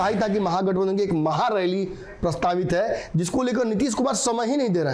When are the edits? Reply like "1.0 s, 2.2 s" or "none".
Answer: none